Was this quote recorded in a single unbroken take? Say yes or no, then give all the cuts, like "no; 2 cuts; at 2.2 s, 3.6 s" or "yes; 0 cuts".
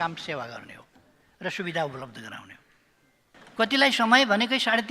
no; 1 cut; at 3.4 s